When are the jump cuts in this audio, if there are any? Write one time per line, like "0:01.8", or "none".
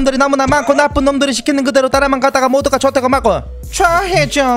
0:03.6